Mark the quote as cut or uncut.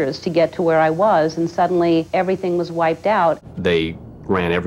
cut